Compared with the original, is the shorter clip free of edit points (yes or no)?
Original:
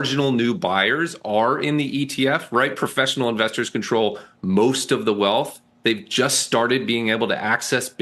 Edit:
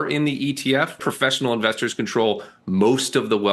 no